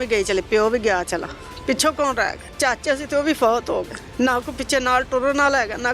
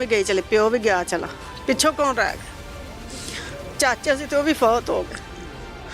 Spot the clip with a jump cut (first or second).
first